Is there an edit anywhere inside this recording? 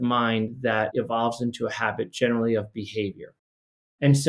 yes; 1 cut; at 0.9 s

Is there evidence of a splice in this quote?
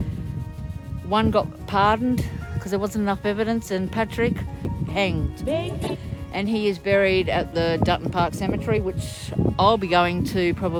no; 0 cuts

